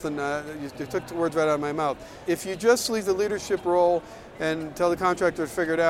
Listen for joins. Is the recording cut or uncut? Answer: uncut